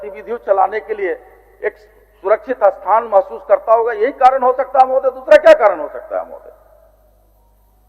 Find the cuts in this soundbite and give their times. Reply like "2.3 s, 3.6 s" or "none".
none